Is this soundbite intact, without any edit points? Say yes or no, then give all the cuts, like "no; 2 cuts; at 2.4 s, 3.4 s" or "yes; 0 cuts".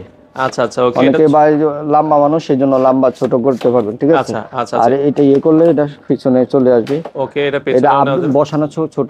yes; 0 cuts